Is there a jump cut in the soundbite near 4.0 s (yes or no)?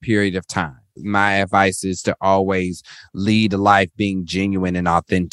no